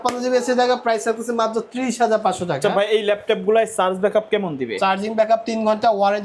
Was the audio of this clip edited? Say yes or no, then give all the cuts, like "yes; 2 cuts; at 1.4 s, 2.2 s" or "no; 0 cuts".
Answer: no; 0 cuts